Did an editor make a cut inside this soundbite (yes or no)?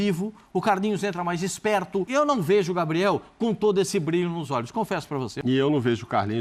yes